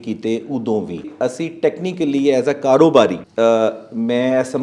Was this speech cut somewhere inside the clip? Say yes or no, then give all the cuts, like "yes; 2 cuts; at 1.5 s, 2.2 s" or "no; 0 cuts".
yes; 2 cuts; at 1.1 s, 3.2 s